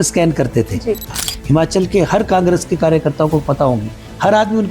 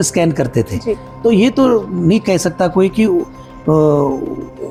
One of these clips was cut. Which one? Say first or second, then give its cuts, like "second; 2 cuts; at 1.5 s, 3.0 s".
first; 1 cut; at 1.1 s